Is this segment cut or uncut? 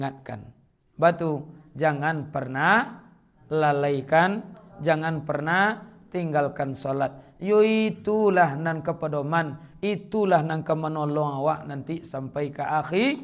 uncut